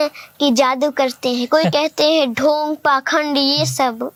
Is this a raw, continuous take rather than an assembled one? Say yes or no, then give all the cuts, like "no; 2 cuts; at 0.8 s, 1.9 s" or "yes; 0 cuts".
yes; 0 cuts